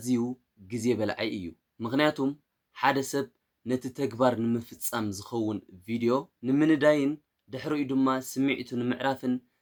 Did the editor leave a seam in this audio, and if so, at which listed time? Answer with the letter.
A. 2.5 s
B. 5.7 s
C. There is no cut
C